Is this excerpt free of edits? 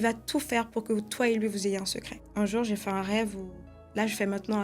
no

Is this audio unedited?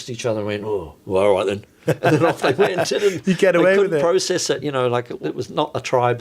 no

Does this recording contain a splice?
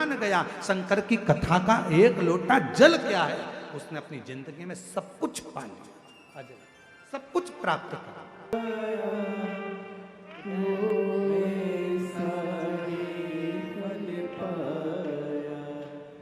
yes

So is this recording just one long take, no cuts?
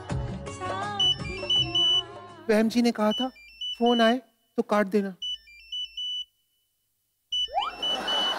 yes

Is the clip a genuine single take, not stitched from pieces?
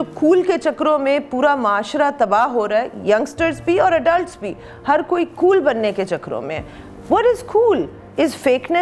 yes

